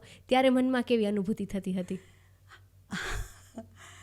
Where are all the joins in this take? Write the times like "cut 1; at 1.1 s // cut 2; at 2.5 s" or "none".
none